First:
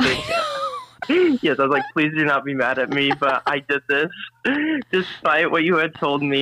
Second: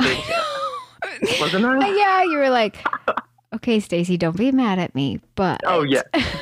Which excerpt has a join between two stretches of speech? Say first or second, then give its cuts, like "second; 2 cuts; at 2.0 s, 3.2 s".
first; 2 cuts; at 1.0 s, 4.3 s